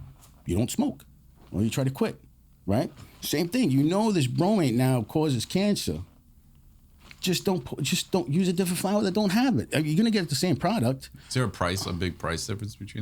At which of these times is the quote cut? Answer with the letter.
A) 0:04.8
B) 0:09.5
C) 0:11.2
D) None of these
C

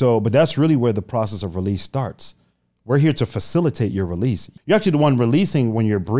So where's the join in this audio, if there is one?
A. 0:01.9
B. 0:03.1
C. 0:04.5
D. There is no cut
C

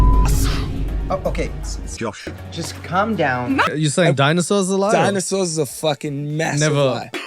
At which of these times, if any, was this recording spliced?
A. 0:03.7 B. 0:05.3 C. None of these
A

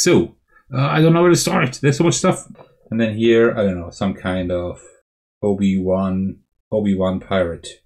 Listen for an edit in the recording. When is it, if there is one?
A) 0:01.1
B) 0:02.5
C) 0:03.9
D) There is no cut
B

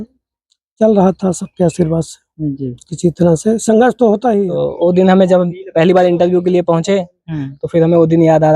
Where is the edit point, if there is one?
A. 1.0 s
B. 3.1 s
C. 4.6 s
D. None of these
C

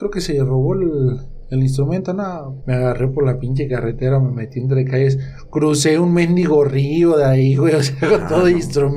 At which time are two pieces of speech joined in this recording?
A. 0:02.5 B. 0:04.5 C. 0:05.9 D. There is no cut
A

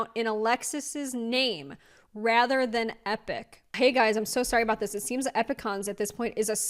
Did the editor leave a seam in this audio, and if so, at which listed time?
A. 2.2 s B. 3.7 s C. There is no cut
B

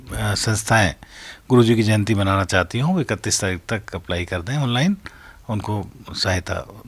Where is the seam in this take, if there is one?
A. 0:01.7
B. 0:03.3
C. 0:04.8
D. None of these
D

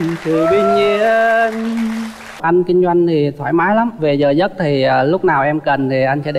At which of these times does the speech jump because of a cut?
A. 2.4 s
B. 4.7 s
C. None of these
A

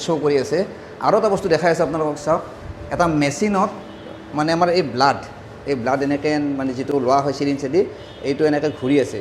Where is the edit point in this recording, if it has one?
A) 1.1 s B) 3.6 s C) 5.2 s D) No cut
D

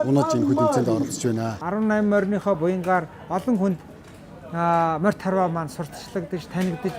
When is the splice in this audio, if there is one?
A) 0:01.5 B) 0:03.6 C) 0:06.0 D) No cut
A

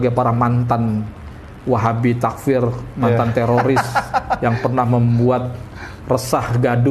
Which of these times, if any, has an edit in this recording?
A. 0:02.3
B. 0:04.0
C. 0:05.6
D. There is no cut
D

